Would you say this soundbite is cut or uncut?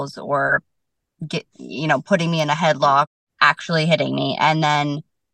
cut